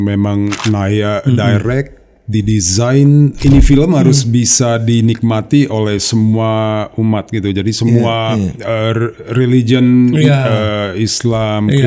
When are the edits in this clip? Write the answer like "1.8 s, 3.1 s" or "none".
3.4 s